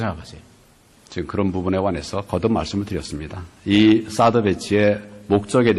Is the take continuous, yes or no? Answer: no